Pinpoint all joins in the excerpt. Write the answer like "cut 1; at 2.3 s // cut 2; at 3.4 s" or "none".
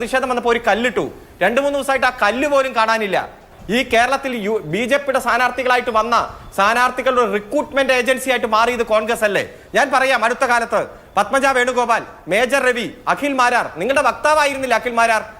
cut 1; at 3.5 s